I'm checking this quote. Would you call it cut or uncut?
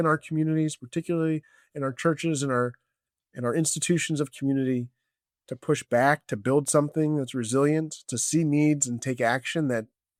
uncut